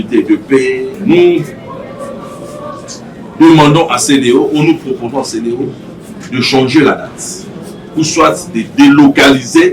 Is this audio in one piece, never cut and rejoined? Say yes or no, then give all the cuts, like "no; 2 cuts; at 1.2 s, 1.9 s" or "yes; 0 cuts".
no; 1 cut; at 0.9 s